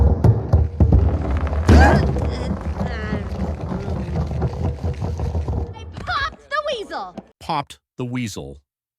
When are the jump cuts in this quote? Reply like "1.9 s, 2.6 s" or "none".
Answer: 7.3 s